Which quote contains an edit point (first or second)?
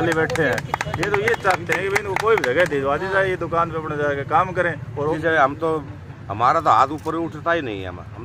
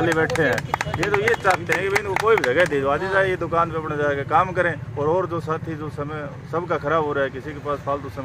first